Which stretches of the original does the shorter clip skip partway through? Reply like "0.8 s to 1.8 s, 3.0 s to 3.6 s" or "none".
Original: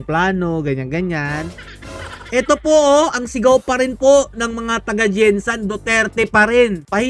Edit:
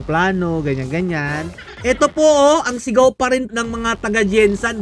1.6 s to 2.1 s, 3.9 s to 4.3 s